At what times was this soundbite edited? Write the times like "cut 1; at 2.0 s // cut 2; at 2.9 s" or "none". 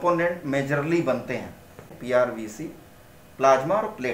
cut 1; at 1.8 s

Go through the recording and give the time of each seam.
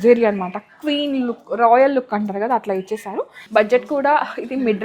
cut 1; at 3.4 s

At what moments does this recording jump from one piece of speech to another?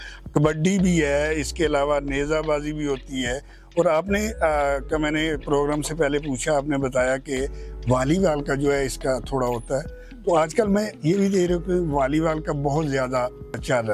none

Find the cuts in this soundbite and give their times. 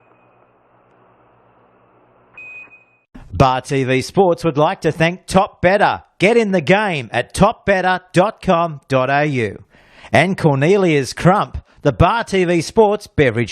cut 1; at 2.7 s

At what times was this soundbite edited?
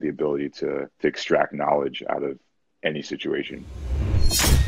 cut 1; at 0.9 s // cut 2; at 4.0 s

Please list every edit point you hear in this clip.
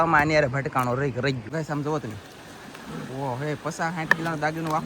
cut 1; at 1.4 s

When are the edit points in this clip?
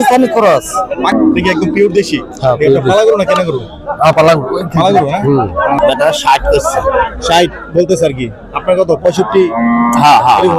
cut 1; at 1.1 s // cut 2; at 5.8 s

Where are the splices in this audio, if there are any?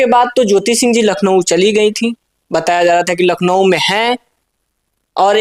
none

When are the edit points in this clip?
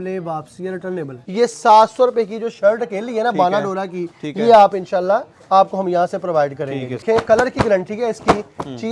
cut 1; at 1.2 s // cut 2; at 7.0 s

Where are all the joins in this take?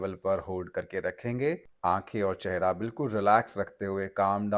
none

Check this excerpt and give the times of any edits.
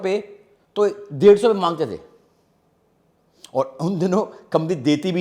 none

